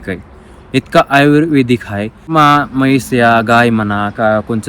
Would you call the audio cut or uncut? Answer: cut